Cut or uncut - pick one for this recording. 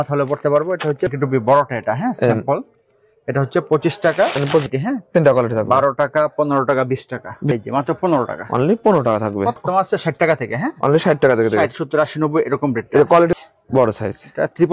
cut